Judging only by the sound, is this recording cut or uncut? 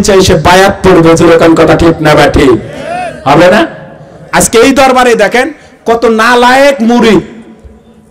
uncut